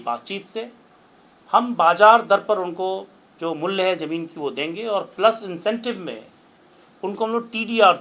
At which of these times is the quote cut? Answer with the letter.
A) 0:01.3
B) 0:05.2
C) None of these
C